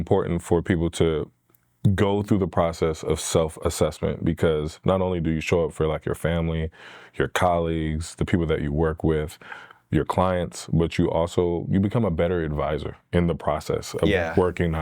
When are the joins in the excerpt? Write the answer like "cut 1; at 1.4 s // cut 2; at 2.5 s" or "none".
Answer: none